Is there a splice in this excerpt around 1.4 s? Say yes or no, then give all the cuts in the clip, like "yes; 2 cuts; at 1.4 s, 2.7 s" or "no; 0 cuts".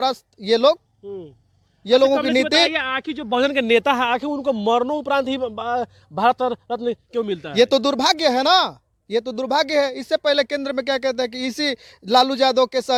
no; 0 cuts